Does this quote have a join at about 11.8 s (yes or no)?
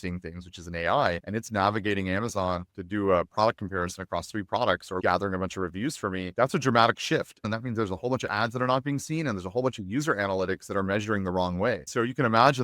yes